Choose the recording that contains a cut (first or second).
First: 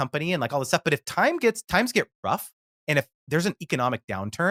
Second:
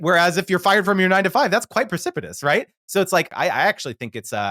second